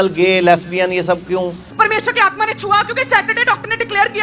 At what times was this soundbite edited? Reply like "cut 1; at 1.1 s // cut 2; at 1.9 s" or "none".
cut 1; at 1.6 s